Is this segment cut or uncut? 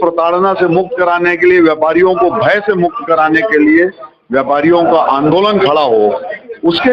uncut